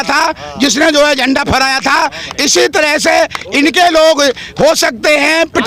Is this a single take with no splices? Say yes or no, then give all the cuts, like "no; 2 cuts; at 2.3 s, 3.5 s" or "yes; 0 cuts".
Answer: yes; 0 cuts